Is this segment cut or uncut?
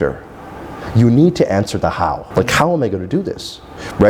cut